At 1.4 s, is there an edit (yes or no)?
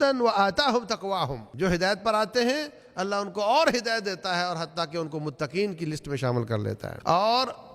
yes